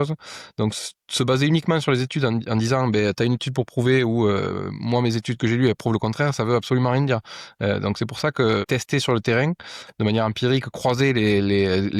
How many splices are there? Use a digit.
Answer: 0